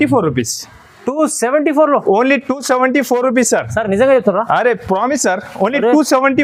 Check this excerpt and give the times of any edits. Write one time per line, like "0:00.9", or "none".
none